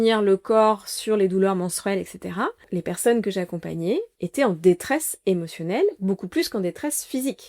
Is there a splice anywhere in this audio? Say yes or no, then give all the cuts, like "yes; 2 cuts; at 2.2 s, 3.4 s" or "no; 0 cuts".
yes; 1 cut; at 2.6 s